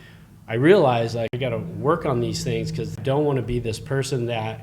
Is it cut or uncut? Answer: cut